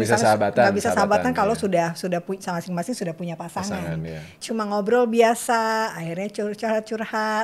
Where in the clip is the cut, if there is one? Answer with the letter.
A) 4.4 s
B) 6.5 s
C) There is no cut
A